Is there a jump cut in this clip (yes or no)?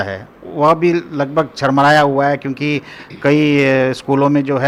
no